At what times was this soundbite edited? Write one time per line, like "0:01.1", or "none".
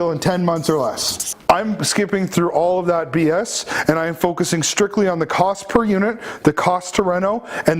0:01.3